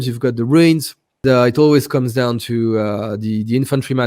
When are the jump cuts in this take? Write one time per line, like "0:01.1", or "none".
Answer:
0:01.2